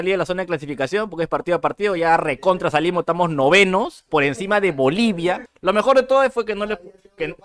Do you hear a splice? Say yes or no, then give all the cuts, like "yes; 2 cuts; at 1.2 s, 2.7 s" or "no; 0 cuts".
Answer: yes; 1 cut; at 5.5 s